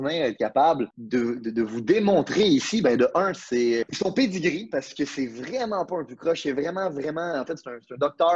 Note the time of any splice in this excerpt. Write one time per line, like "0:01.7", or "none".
0:00.9
0:03.9